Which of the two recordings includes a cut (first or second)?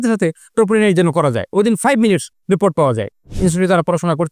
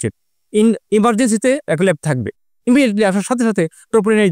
first